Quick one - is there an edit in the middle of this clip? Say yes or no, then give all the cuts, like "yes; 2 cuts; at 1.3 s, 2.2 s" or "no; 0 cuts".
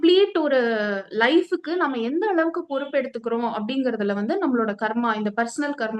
no; 0 cuts